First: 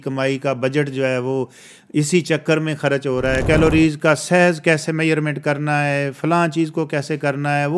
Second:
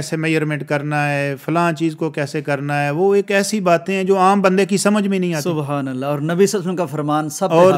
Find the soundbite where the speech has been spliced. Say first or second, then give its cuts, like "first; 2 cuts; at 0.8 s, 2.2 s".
first; 1 cut; at 3.4 s